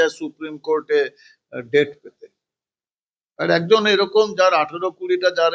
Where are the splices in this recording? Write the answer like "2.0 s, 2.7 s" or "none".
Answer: none